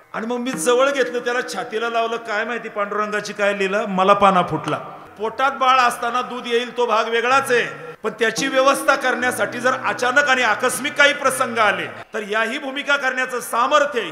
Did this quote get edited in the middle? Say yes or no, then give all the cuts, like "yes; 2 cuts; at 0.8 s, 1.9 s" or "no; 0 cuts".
yes; 3 cuts; at 5.0 s, 7.8 s, 12.0 s